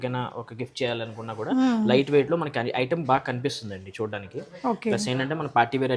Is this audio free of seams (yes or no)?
yes